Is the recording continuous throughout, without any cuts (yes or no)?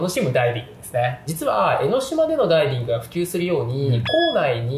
no